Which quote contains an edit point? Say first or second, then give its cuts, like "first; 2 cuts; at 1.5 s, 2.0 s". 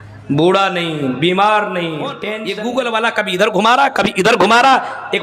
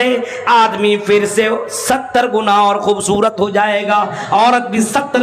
first; 1 cut; at 2.3 s